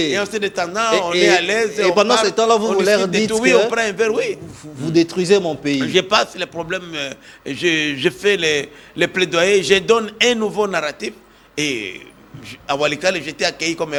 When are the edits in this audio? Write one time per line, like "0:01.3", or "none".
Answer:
none

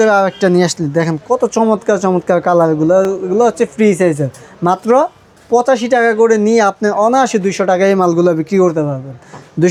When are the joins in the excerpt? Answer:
none

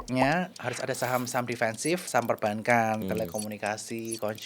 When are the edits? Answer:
0:02.1

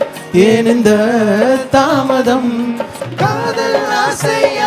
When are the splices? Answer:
0:02.9

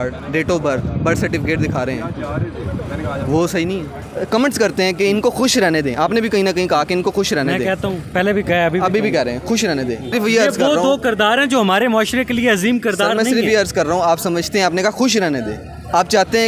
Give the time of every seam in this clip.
0:04.0
0:10.1

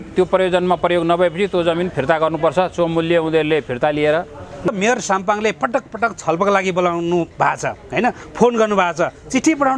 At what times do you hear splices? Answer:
0:04.7

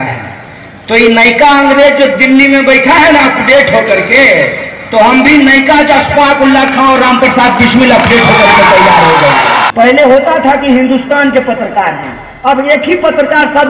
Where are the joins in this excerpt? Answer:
0:09.7

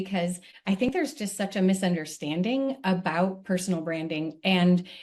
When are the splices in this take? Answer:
0:00.9

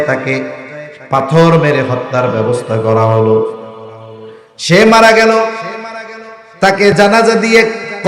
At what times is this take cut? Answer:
0:06.9

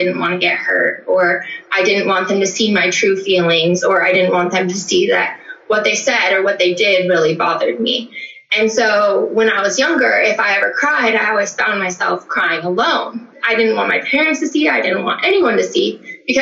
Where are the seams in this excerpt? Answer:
0:13.3

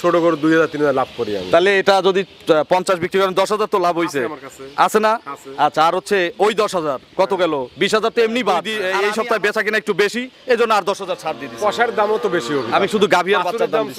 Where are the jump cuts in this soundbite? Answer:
0:08.8

